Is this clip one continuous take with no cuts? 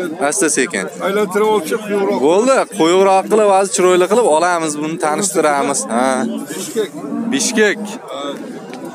yes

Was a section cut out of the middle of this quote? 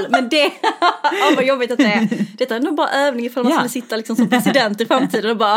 no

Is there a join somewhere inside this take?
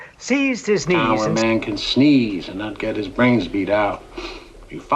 yes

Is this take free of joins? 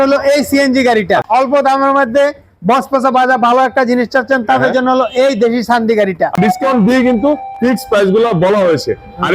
no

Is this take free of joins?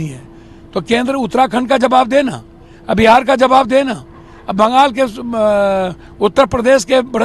yes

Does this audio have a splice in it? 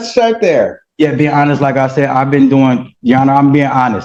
no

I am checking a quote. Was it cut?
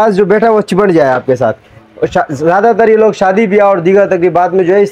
no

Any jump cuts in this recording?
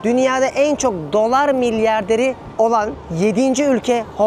no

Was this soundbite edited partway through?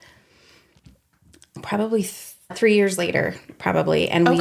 yes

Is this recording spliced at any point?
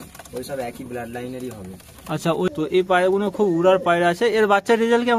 yes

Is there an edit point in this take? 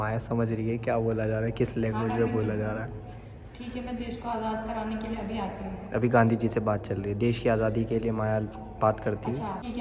no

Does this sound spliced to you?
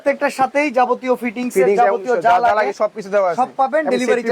no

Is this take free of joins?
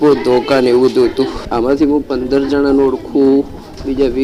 no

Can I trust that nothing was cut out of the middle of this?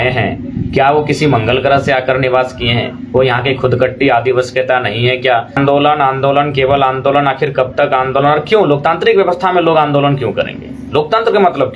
no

